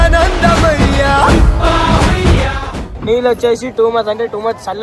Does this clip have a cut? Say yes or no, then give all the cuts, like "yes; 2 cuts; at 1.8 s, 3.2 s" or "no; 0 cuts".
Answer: yes; 1 cut; at 2.9 s